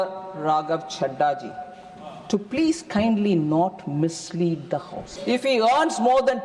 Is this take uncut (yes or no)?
no